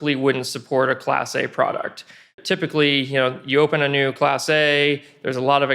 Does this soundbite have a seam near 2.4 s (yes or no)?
yes